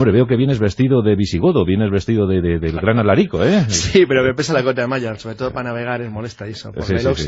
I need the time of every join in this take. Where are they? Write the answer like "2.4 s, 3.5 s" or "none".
6.0 s

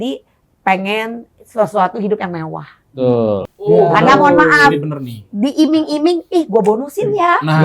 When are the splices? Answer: 3.4 s

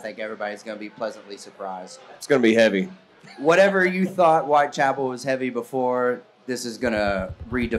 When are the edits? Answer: 2.2 s, 3.2 s

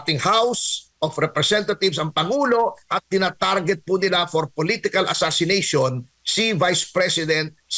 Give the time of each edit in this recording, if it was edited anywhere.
none

